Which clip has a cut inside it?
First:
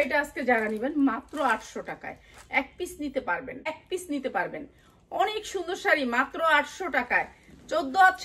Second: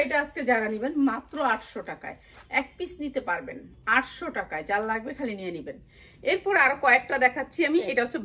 first; 1 cut; at 3.8 s

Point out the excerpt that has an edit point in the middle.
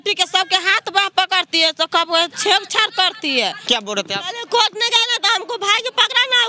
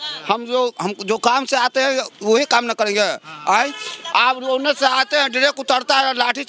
first; 1 cut; at 3.6 s

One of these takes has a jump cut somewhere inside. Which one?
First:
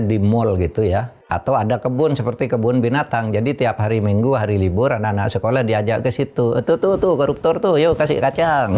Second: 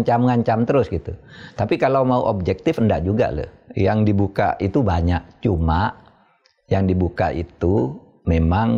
first; 1 cut; at 1.2 s

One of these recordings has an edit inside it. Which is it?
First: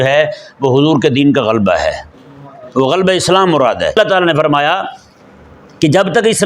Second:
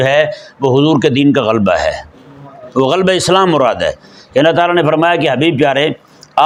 first; 1 cut; at 3.9 s

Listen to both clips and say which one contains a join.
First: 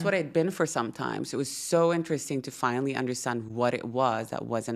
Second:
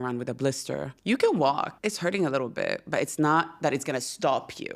second; 2 cuts; at 0.9 s, 1.7 s

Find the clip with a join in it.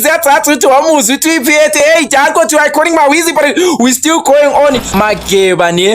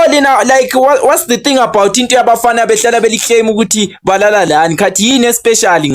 first; 1 cut; at 4.9 s

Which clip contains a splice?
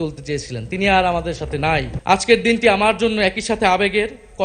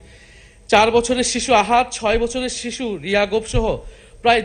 first; 1 cut; at 1.9 s

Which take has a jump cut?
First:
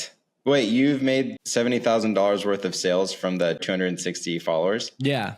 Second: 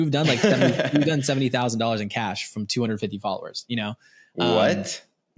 first; 2 cuts; at 1.4 s, 3.6 s

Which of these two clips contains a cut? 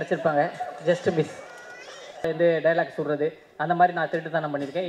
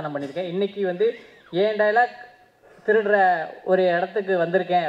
first; 1 cut; at 2.2 s

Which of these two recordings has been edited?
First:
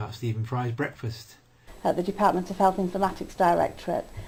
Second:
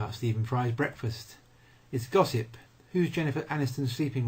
second; 1 cut; at 1.7 s

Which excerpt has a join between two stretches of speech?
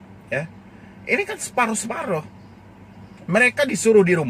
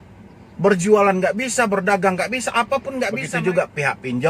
second; 1 cut; at 3.2 s

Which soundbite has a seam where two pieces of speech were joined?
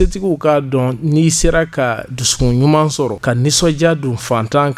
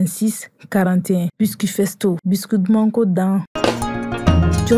first; 1 cut; at 3.2 s

